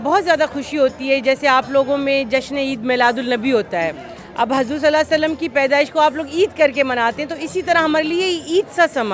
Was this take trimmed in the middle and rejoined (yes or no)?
no